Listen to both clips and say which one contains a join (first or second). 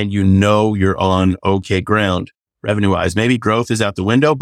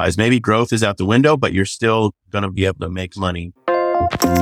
second